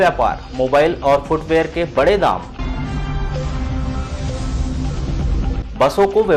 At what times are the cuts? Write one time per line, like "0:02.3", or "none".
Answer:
none